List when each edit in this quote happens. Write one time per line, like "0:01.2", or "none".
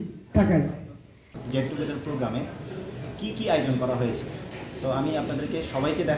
0:01.4